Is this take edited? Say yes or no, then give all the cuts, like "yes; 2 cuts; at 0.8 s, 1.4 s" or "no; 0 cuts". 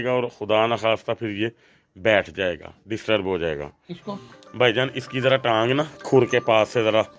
yes; 1 cut; at 4.1 s